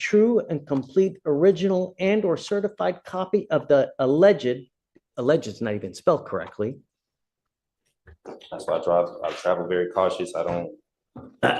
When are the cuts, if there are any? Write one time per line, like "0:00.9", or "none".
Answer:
0:07.3